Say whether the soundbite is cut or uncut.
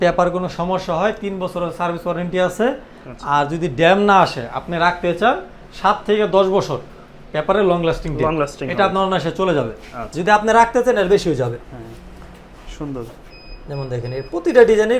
uncut